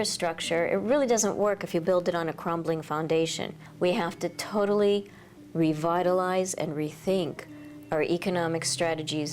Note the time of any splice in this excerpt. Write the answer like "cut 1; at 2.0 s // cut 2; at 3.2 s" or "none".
cut 1; at 3.6 s